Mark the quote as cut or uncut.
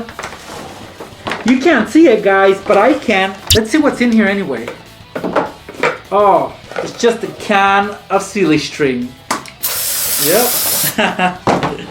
cut